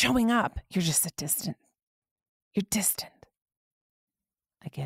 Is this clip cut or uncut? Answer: uncut